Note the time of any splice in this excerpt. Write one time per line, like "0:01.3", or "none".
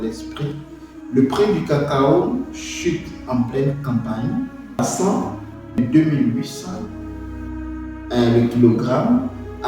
0:04.8
0:05.8